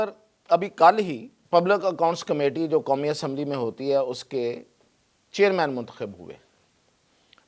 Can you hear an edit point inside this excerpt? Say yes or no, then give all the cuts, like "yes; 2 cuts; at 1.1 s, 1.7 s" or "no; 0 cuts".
yes; 1 cut; at 1.3 s